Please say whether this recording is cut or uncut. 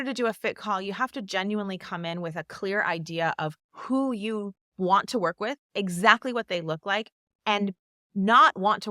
cut